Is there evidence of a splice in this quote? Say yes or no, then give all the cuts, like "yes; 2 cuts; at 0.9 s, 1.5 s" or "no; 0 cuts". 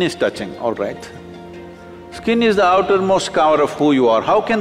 no; 0 cuts